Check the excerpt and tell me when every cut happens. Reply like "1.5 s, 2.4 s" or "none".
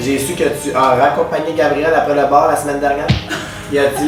none